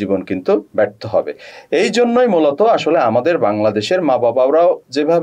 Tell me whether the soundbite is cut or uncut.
uncut